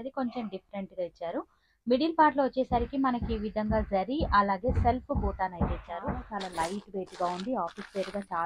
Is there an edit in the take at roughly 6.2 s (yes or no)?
yes